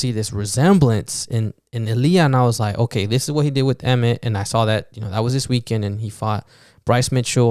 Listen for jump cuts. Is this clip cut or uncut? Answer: uncut